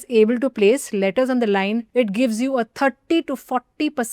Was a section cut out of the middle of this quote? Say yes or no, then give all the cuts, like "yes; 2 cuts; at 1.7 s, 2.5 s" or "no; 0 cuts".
yes; 1 cut; at 1.9 s